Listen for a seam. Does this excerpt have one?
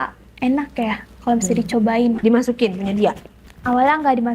yes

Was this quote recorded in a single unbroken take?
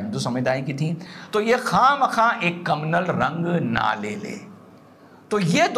yes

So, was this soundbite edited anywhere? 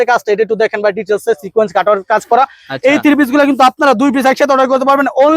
no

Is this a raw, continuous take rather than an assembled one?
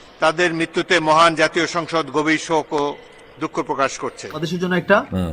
no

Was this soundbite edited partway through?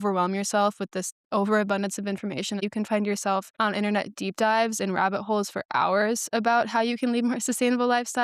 yes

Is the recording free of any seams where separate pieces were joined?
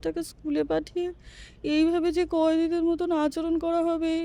yes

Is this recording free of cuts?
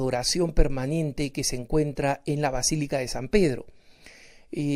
yes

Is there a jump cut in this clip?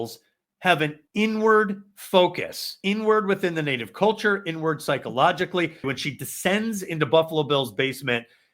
yes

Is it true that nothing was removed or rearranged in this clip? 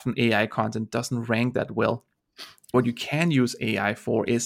no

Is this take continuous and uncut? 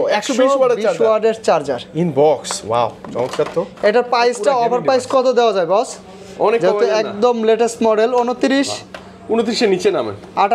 yes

